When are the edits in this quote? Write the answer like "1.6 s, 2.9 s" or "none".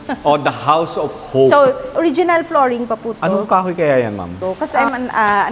1.9 s, 4.4 s

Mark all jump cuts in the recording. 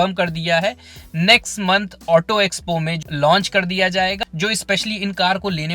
3.0 s, 4.2 s

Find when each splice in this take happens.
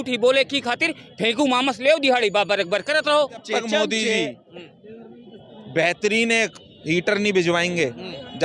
3.5 s

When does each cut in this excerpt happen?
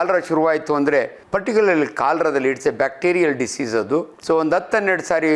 1.2 s, 4.1 s

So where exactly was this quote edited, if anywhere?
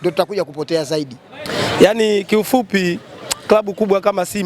1.5 s

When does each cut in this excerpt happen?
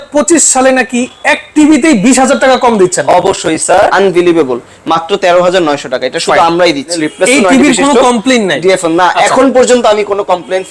3.9 s, 7.0 s

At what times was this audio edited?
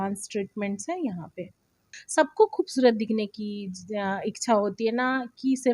2.0 s

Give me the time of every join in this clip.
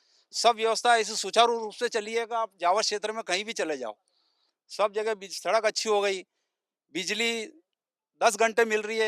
none

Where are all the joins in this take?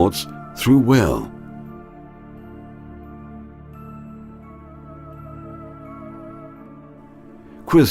2.9 s

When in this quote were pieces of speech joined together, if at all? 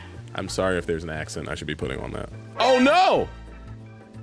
2.4 s

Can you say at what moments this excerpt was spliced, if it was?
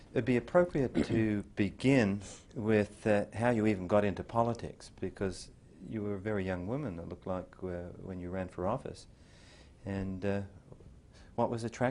10.6 s

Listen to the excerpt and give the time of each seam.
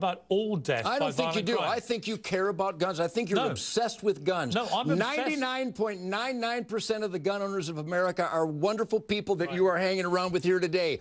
none

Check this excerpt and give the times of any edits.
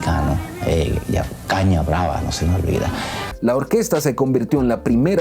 3.2 s

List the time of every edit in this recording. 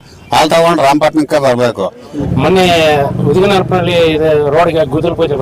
2.3 s

